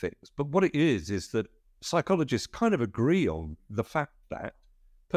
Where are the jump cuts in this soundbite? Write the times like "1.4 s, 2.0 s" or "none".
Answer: none